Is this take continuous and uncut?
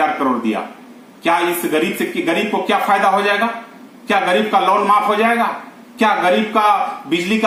yes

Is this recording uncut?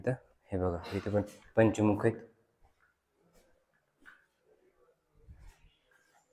yes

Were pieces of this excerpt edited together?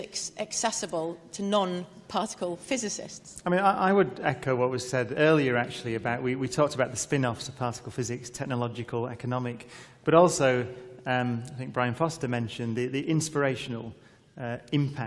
yes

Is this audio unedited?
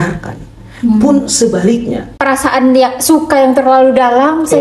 no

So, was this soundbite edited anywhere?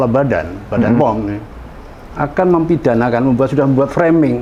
no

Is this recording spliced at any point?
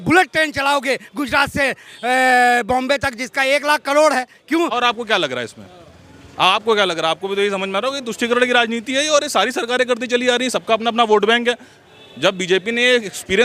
yes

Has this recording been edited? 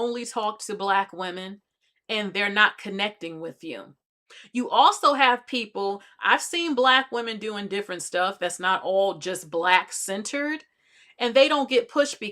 no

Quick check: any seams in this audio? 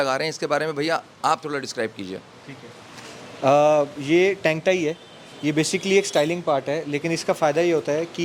no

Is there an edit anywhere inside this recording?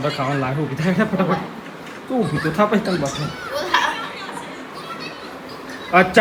no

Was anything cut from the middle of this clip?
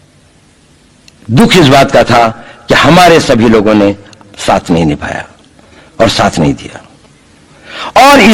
no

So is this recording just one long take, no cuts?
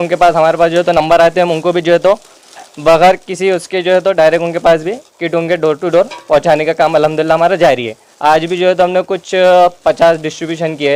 yes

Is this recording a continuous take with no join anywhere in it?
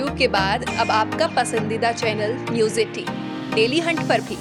yes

